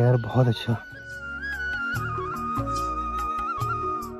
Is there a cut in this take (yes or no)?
yes